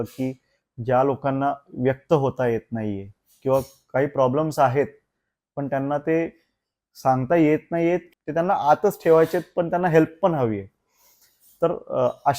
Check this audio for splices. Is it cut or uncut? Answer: cut